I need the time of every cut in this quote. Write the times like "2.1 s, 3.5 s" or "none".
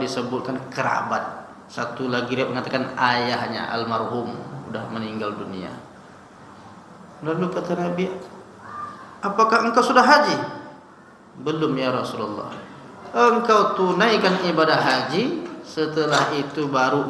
none